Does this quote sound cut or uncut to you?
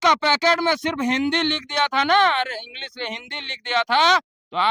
uncut